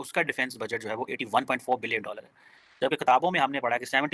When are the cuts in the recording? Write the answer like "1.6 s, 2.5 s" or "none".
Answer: none